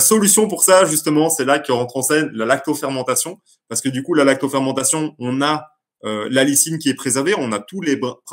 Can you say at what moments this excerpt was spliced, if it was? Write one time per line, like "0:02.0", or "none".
none